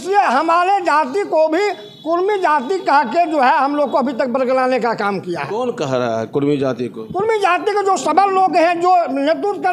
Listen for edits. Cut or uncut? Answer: uncut